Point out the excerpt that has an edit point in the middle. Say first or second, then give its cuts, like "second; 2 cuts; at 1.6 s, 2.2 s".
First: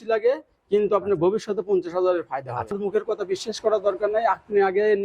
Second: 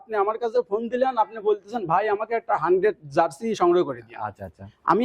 first; 1 cut; at 2.7 s